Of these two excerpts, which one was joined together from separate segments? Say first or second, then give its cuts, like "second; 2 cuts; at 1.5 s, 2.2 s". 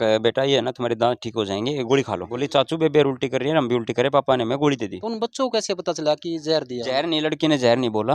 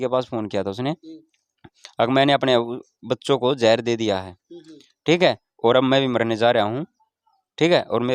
first; 2 cuts; at 2.3 s, 5.0 s